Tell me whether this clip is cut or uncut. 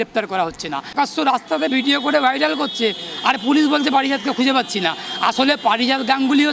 cut